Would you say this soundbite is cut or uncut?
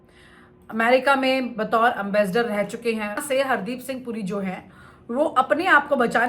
cut